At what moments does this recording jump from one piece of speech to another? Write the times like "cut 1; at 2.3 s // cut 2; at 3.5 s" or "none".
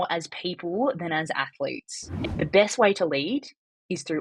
cut 1; at 2.2 s